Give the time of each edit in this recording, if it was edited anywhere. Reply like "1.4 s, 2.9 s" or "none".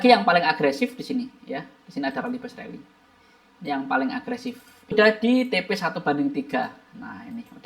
4.9 s